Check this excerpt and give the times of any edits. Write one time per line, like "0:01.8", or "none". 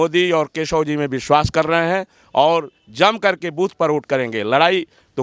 none